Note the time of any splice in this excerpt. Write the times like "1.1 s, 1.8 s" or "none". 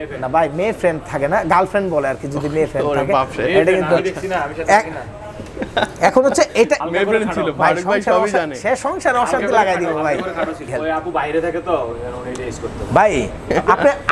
6.9 s, 10.7 s